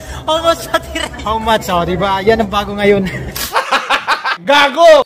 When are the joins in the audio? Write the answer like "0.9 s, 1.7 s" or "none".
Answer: 1.1 s